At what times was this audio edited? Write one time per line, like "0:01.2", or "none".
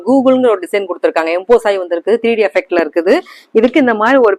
none